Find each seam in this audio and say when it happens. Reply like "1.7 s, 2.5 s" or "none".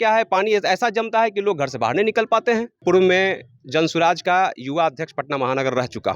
2.8 s